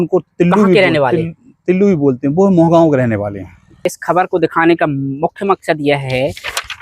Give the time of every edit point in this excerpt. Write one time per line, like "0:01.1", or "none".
0:03.7